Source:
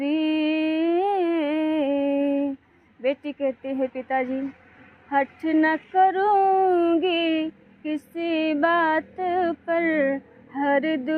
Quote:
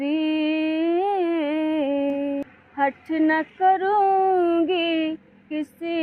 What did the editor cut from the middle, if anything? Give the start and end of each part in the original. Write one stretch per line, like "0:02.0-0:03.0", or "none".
0:02.4-0:04.7